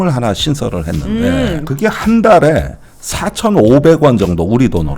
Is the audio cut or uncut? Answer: cut